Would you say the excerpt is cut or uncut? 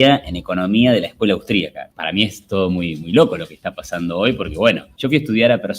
cut